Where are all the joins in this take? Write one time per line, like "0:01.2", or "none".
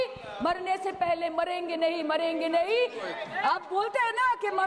0:03.1